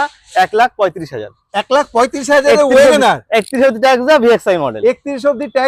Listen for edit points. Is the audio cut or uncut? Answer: uncut